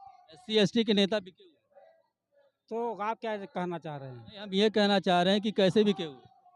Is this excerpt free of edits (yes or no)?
yes